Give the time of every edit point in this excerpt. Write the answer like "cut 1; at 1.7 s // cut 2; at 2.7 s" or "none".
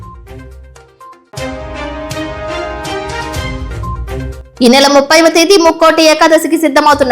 cut 1; at 4.3 s